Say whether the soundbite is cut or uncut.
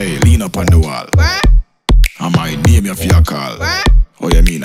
uncut